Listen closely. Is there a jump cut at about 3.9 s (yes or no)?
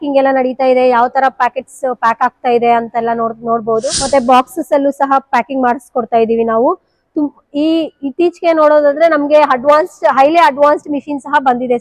yes